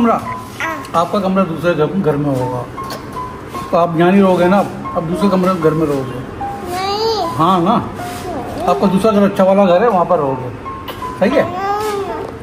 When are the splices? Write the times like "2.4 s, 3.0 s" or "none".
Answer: none